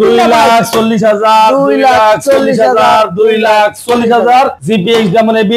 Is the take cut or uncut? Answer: cut